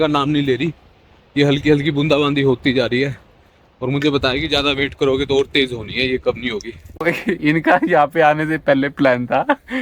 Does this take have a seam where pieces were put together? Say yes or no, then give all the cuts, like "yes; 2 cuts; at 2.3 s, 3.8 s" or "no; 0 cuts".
yes; 1 cut; at 7.0 s